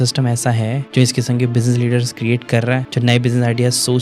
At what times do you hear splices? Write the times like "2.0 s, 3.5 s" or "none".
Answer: 2.9 s